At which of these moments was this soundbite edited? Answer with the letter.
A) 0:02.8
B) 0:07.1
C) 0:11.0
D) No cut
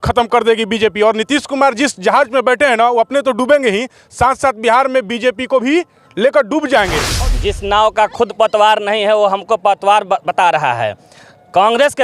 B